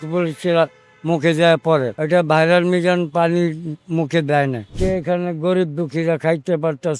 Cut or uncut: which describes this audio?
cut